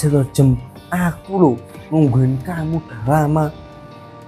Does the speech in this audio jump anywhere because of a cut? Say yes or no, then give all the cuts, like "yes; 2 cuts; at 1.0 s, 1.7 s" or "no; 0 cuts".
no; 0 cuts